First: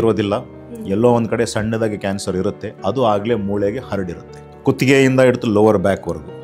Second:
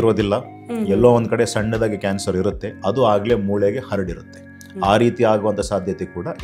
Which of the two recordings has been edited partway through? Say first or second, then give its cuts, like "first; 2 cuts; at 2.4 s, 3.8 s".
first; 1 cut; at 4.5 s